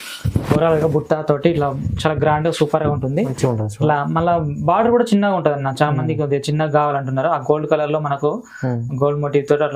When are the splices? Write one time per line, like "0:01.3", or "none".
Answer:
none